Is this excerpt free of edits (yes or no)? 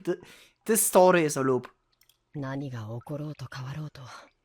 yes